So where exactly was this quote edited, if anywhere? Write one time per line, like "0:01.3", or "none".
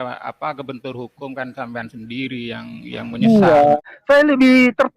0:03.8